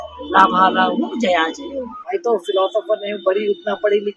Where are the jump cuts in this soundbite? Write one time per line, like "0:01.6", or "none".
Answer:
0:02.0